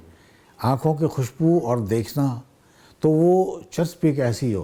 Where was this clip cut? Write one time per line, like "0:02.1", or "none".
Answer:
none